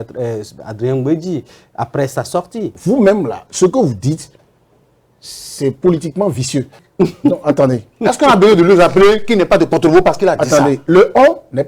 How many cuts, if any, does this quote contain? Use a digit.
2